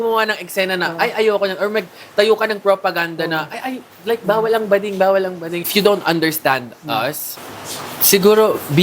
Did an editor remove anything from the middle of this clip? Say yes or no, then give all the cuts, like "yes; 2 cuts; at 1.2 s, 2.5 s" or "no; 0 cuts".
yes; 2 cuts; at 5.7 s, 7.3 s